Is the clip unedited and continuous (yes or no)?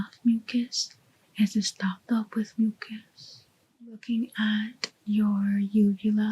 no